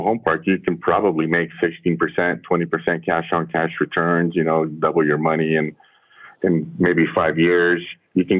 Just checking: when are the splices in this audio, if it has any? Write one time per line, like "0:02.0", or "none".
none